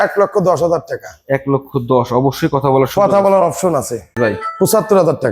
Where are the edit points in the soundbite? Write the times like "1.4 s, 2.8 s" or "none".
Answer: 4.2 s